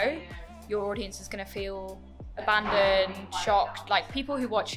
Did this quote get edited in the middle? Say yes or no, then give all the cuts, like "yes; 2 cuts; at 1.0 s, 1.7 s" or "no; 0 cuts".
no; 0 cuts